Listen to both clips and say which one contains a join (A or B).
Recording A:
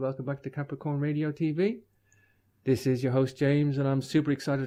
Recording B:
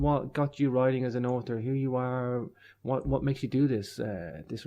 B